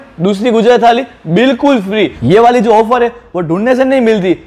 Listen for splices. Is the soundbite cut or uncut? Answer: cut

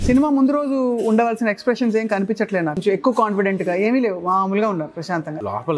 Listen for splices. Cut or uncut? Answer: cut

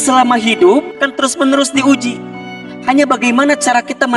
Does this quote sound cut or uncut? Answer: cut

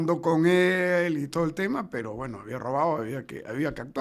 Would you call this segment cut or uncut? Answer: uncut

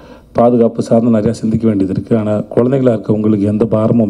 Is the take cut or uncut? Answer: uncut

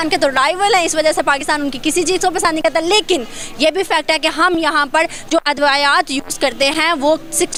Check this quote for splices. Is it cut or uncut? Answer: uncut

